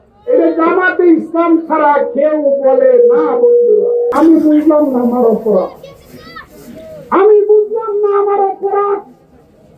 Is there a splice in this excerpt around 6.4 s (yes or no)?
no